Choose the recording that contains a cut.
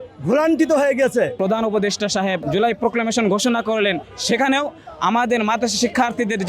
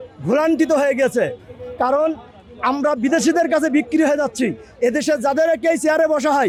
first; 2 cuts; at 1.3 s, 2.4 s

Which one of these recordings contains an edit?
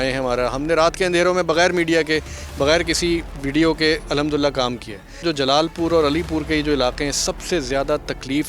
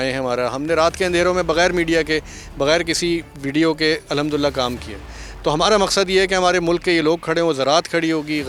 first; 1 cut; at 5.2 s

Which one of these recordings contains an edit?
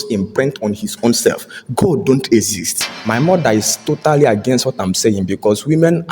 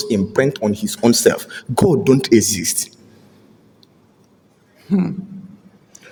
first; 1 cut; at 2.9 s

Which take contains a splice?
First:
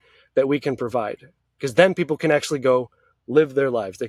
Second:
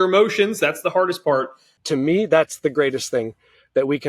second; 1 cut; at 1.8 s

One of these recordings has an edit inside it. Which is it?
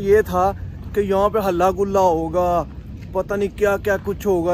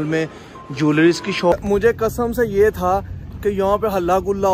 second; 1 cut; at 1.5 s

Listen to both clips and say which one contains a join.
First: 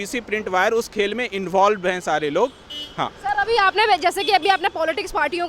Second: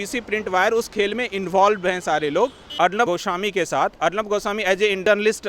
second; 1 cut; at 2.6 s

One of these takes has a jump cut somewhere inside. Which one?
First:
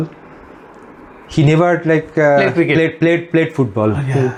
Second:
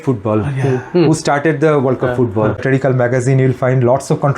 second; 1 cut; at 2.6 s

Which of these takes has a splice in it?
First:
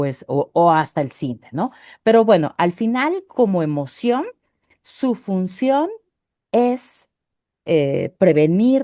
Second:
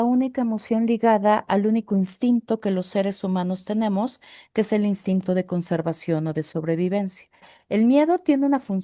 second; 1 cut; at 7.5 s

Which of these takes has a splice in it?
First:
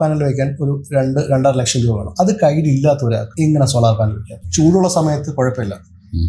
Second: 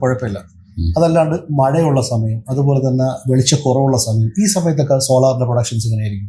first; 1 cut; at 4.4 s

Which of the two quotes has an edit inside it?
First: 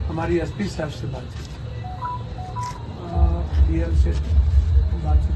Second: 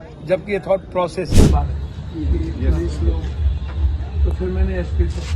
second; 1 cut; at 1.3 s

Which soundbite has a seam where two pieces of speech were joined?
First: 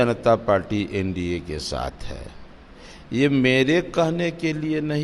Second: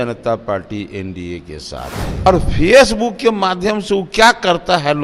second; 1 cut; at 2.3 s

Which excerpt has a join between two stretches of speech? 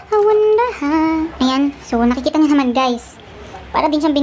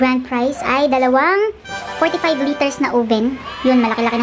first; 1 cut; at 1.3 s

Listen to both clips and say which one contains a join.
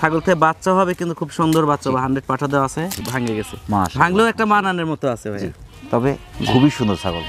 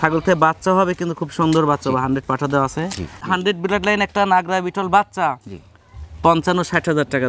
second; 1 cut; at 3.2 s

